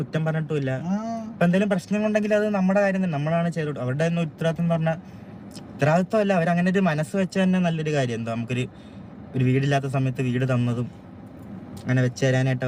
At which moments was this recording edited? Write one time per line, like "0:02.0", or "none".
none